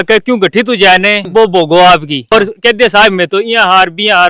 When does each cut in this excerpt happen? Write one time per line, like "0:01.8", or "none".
0:01.2
0:02.3